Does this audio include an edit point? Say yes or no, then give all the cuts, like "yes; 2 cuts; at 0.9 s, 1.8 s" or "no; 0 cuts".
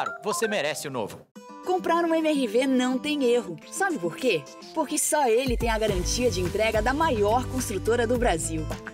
yes; 1 cut; at 1.2 s